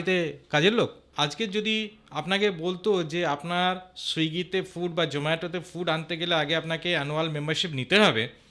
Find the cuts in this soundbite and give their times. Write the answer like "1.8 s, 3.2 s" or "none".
1.1 s